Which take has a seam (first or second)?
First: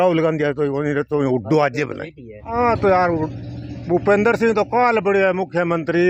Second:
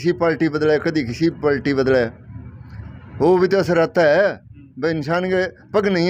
first